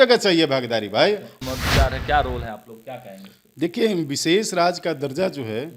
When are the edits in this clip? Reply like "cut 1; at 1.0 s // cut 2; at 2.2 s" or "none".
cut 1; at 1.4 s